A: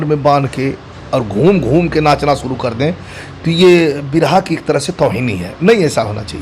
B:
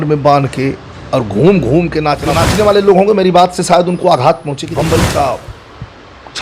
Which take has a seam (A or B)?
B